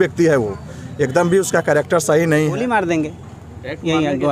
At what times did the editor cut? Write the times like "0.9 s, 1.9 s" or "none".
2.6 s